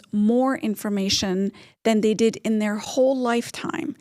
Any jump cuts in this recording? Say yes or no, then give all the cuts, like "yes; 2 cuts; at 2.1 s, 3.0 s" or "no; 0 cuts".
no; 0 cuts